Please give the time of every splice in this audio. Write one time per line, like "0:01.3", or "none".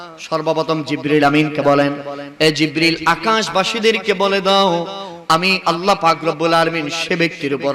0:05.6